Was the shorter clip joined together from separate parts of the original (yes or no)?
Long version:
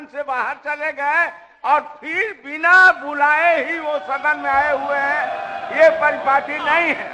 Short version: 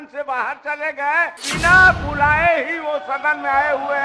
yes